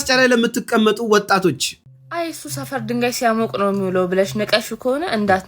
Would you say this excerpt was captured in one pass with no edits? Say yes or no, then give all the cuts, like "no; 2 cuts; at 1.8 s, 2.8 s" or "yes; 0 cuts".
no; 1 cut; at 1.7 s